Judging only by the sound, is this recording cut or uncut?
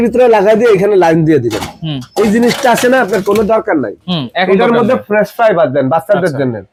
uncut